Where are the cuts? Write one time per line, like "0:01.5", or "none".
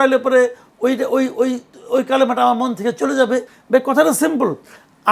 0:03.5